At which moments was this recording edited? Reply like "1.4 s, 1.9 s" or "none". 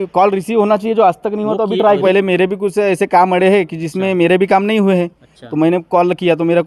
2.0 s